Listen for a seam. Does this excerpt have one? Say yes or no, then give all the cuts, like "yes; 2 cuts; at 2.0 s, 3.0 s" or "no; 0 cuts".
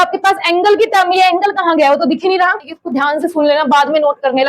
yes; 1 cut; at 2.8 s